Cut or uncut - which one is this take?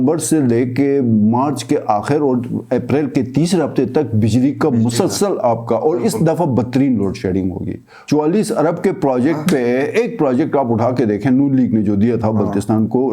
cut